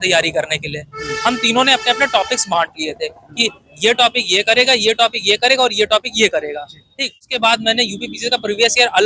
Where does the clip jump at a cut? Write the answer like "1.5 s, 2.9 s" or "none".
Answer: 7.3 s